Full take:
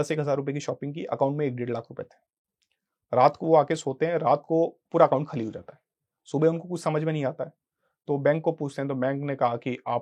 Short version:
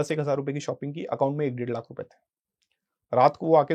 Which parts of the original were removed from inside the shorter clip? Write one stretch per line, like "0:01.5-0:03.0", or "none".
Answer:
none